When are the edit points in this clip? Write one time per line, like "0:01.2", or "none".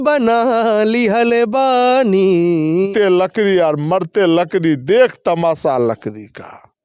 0:02.9

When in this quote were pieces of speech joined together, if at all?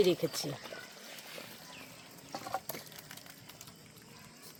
none

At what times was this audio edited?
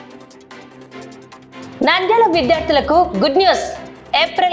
0:01.7

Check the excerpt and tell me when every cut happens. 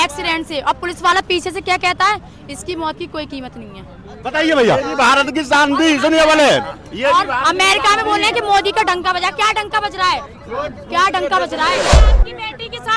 0:11.9

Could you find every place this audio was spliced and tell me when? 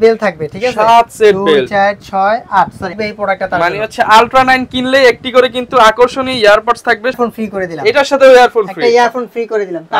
0:03.0
0:07.2

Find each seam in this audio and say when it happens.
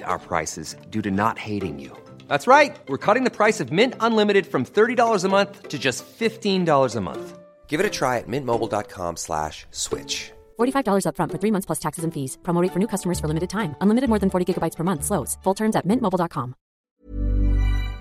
0:16.9

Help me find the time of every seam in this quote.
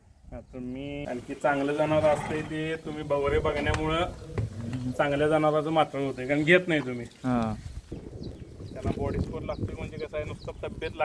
0:01.0
0:08.0

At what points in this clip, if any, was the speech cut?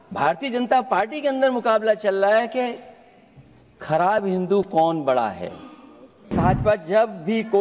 0:06.4

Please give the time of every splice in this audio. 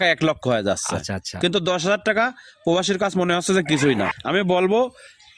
0:04.2

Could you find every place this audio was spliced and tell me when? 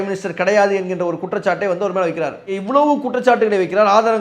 0:02.5

